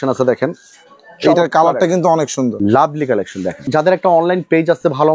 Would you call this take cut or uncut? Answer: cut